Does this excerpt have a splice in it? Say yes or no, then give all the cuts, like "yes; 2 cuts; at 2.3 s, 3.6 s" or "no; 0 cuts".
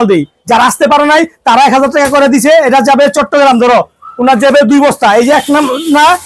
no; 0 cuts